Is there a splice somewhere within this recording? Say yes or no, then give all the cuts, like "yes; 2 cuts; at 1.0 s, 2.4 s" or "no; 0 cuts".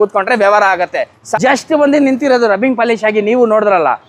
yes; 1 cut; at 1.2 s